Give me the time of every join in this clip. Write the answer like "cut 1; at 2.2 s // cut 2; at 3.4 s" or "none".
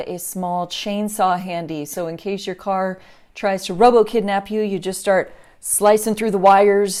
none